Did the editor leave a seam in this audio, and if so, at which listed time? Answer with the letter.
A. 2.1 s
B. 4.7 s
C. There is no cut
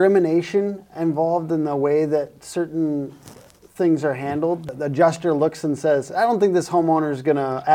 B